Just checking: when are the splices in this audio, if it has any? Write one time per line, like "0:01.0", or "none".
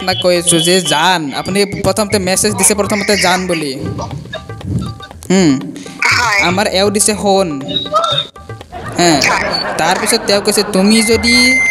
none